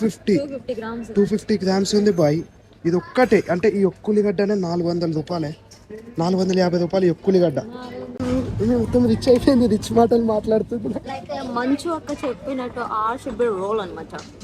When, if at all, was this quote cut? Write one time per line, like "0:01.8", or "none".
0:08.2